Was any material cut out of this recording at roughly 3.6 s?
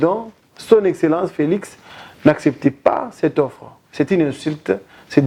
no; 0 cuts

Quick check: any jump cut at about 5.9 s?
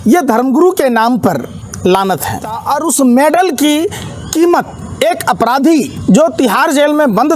yes; 2 cuts; at 2.6 s, 5.9 s

